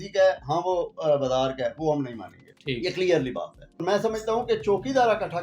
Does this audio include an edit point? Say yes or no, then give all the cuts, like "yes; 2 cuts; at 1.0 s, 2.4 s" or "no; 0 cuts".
yes; 1 cut; at 3.8 s